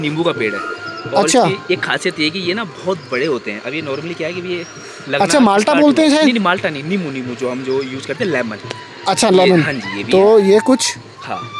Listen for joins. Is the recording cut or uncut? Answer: uncut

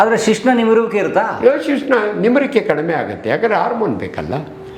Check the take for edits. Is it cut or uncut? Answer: uncut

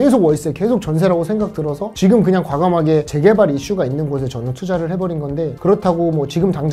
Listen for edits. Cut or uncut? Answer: uncut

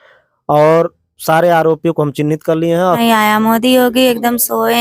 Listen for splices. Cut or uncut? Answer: cut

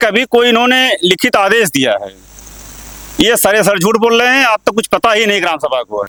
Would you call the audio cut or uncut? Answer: uncut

